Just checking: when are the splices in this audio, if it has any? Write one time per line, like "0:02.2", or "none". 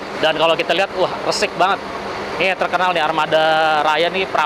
none

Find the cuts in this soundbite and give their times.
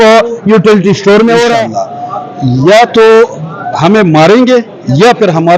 0:01.8

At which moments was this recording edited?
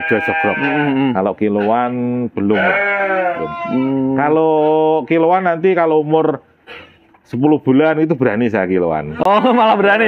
none

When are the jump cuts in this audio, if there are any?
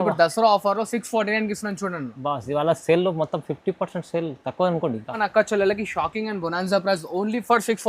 0:05.2

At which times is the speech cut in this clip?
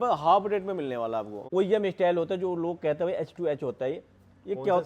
0:01.4

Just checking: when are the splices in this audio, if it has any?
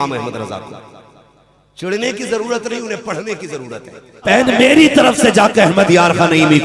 0:04.2

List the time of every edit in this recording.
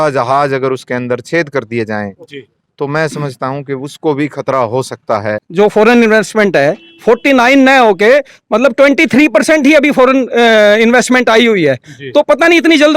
0:05.4

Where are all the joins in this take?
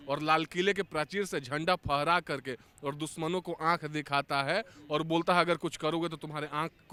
none

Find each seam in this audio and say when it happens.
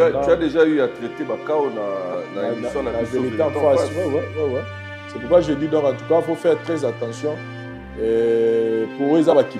none

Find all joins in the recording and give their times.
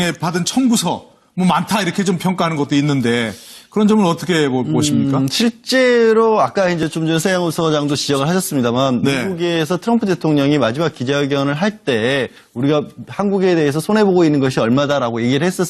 none

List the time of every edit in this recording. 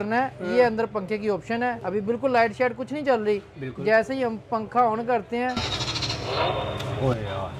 0:01.8

